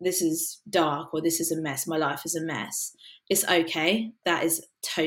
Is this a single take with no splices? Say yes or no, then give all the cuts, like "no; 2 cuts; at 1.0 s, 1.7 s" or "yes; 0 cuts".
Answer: no; 2 cuts; at 3.1 s, 4.2 s